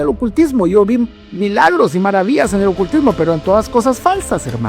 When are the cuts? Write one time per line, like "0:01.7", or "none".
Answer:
none